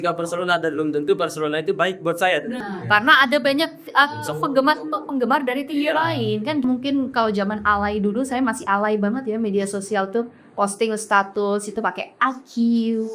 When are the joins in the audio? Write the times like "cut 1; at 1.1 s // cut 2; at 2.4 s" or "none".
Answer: cut 1; at 2.6 s // cut 2; at 6.6 s